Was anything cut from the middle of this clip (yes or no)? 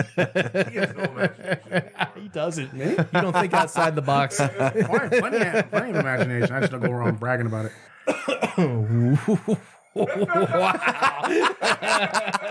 no